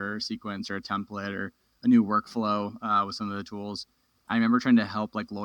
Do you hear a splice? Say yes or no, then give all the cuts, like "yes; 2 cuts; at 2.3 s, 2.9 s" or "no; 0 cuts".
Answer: yes; 1 cut; at 4.2 s